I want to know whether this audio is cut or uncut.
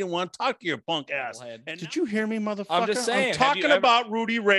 cut